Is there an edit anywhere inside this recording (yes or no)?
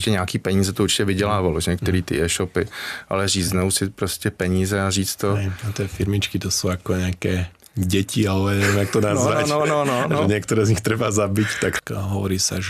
yes